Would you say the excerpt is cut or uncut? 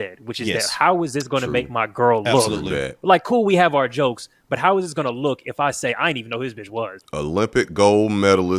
uncut